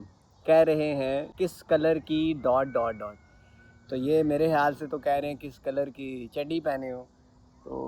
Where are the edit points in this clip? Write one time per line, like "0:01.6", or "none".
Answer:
0:01.3